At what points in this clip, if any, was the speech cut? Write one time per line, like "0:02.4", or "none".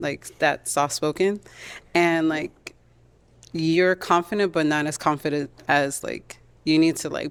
none